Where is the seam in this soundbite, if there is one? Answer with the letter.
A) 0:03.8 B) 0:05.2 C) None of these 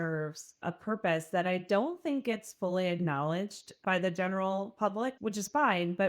B